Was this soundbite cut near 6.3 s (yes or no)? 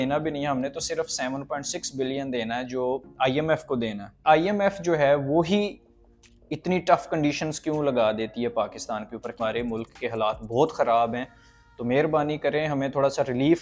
no